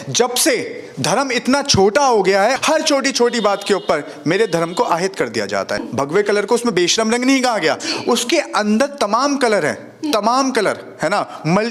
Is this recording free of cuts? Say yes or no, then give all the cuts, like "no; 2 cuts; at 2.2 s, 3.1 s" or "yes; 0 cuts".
no; 2 cuts; at 2.6 s, 5.9 s